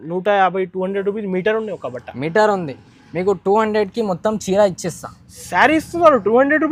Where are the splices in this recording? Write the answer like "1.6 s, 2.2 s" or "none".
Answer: none